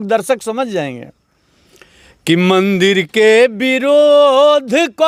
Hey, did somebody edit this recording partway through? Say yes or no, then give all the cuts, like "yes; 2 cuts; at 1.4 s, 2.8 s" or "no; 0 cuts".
no; 0 cuts